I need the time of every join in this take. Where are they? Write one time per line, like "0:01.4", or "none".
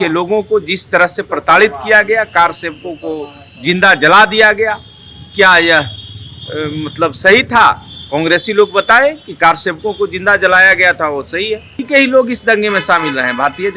0:11.8